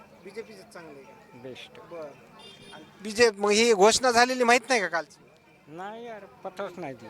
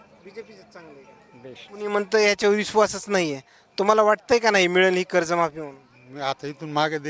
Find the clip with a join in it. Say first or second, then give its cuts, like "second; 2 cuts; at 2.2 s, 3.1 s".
second; 1 cut; at 1.6 s